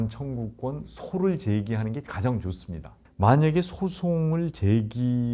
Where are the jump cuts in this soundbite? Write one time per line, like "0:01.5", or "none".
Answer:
none